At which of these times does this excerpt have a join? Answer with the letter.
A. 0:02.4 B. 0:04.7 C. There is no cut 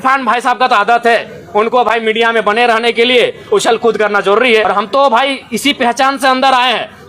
B